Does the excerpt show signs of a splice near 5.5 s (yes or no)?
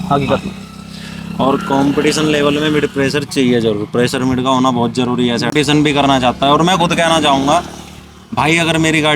yes